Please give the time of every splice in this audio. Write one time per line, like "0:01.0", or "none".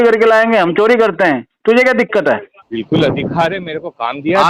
0:02.6